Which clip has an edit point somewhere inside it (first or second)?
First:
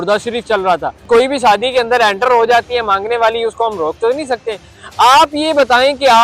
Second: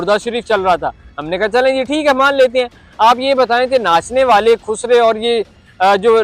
first